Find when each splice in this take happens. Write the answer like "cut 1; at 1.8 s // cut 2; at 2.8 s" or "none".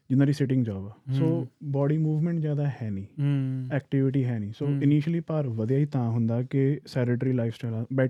none